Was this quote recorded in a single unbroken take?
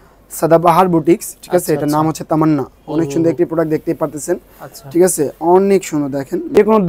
no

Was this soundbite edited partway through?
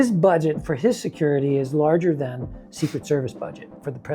no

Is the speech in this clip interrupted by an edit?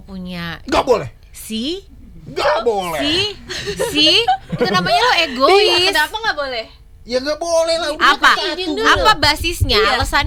no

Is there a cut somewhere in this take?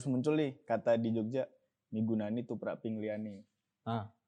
no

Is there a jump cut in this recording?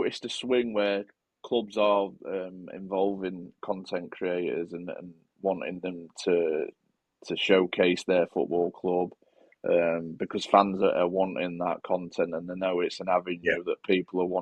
no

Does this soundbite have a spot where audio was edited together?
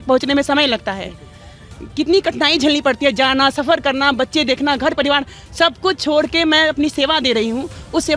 no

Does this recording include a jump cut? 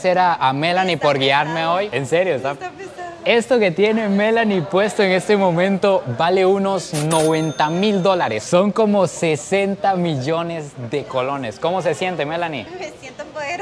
no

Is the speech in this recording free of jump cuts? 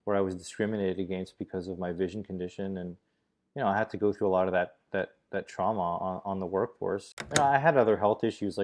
no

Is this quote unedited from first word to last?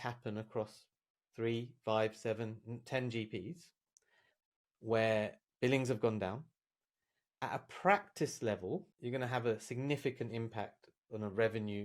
no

